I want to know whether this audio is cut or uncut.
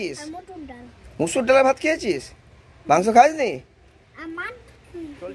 uncut